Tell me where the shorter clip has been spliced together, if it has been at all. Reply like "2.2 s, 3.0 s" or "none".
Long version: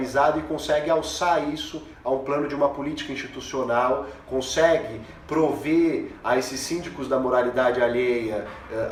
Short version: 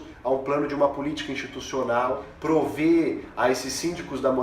2.3 s